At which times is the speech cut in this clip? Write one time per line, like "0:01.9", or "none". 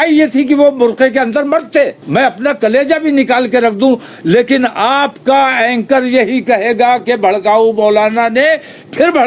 0:02.0